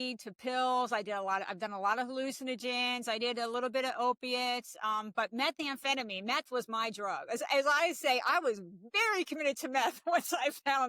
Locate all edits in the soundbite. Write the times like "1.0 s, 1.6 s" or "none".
none